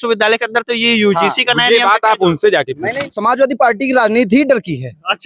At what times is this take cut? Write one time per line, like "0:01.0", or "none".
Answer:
0:03.0